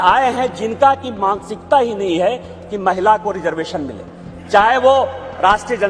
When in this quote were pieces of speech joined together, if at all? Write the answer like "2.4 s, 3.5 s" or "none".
none